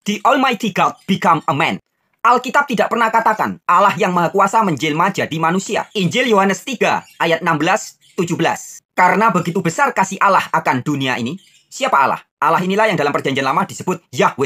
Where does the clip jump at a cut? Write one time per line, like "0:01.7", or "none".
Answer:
0:05.9